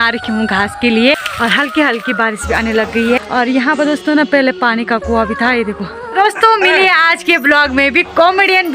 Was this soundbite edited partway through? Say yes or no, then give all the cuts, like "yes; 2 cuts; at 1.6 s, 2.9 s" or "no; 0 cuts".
yes; 3 cuts; at 1.3 s, 3.2 s, 6.1 s